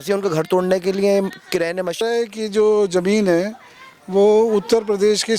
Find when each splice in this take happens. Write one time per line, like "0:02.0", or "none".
0:02.0